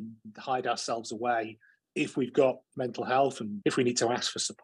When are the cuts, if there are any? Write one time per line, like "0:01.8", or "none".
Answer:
0:02.7
0:03.5